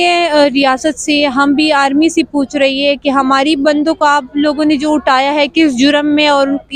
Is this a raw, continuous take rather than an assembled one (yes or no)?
yes